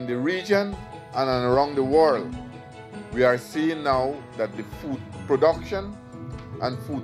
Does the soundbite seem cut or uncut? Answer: uncut